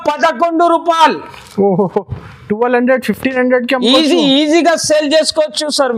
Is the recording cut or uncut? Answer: uncut